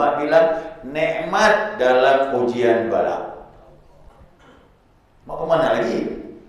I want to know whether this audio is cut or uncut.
cut